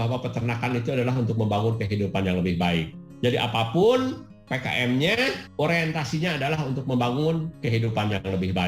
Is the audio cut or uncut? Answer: cut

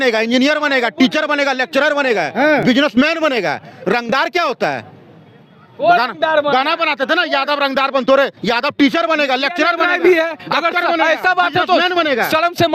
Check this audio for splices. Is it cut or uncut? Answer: uncut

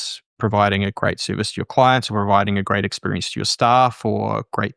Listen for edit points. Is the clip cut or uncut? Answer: uncut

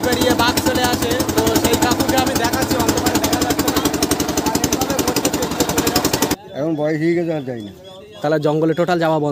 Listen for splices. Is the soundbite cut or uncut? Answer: cut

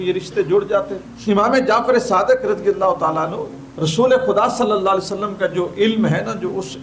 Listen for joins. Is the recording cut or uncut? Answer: cut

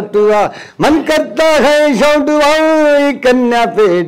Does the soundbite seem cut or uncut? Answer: uncut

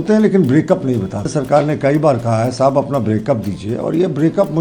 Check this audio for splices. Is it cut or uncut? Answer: cut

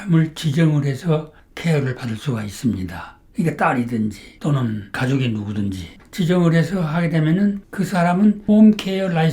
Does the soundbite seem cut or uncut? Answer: cut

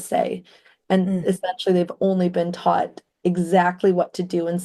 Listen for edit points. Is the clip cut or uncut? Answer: uncut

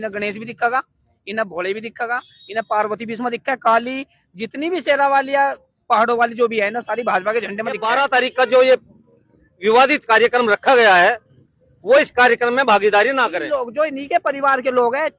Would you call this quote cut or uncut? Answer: cut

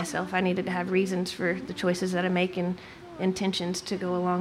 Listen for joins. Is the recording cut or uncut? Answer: uncut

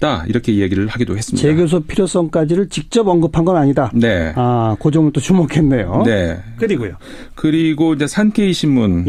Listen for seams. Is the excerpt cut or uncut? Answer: uncut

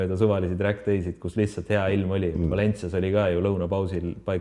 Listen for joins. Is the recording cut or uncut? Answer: uncut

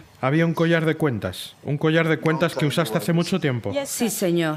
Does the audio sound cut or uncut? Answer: uncut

